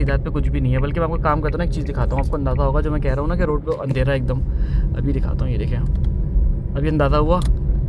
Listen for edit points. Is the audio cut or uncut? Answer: uncut